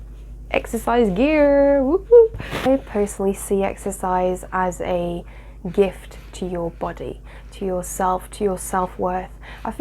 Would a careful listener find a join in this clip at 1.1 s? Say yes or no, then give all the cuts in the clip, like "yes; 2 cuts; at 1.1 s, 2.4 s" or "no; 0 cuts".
no; 1 cut; at 2.6 s